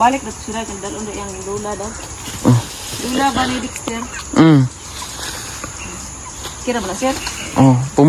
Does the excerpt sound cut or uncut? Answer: uncut